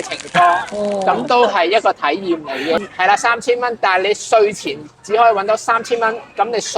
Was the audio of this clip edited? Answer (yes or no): yes